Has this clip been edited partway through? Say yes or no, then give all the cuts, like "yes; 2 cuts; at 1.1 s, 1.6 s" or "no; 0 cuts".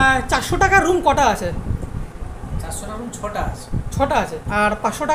no; 0 cuts